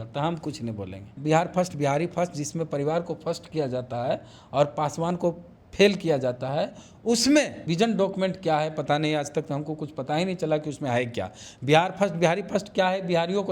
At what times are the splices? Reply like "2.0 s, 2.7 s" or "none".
1.1 s, 7.6 s

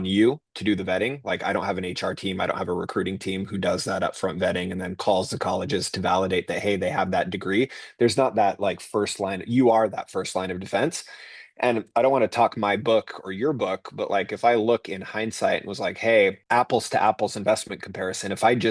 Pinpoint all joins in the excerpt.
16.4 s

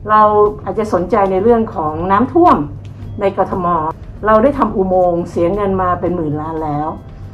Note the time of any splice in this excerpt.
3.9 s

